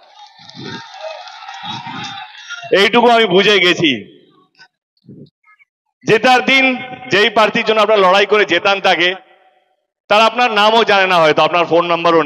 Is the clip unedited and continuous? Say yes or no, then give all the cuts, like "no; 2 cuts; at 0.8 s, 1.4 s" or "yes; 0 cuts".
yes; 0 cuts